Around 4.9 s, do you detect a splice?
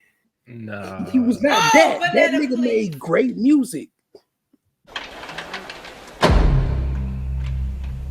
yes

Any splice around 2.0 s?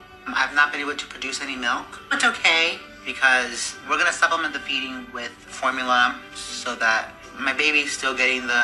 no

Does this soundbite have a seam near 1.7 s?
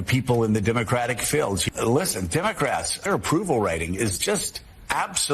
yes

